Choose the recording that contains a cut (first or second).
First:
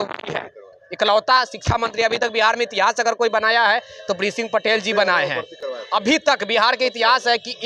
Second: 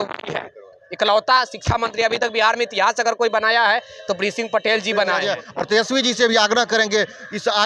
second